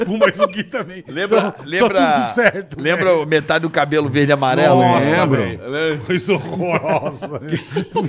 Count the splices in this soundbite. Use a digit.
0